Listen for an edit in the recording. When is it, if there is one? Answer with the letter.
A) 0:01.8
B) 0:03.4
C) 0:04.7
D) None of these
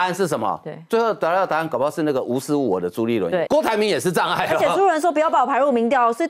B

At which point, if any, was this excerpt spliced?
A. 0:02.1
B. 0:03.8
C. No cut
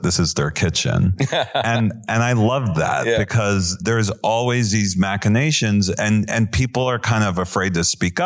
B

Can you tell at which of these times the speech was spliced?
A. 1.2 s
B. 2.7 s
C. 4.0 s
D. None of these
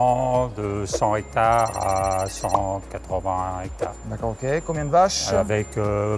D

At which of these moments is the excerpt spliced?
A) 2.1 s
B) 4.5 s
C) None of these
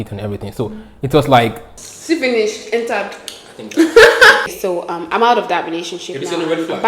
B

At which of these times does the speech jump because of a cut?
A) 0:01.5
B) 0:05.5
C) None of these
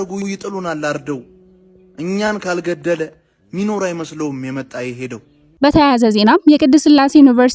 B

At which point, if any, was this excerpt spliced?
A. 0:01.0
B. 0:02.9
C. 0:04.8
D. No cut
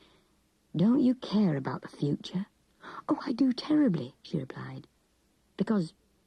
A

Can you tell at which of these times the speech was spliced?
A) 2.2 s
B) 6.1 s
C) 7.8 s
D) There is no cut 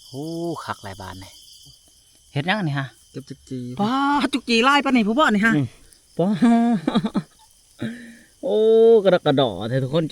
A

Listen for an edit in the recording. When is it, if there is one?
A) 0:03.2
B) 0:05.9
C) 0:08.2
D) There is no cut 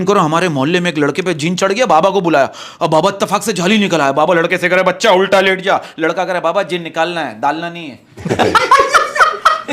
D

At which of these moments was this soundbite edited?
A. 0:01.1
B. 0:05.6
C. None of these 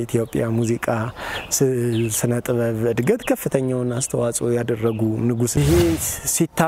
B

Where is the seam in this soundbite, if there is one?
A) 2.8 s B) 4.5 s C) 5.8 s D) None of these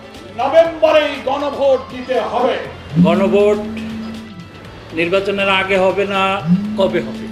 A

